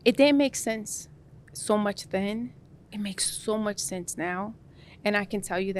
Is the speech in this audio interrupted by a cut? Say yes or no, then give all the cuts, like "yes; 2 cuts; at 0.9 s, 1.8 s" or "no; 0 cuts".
no; 0 cuts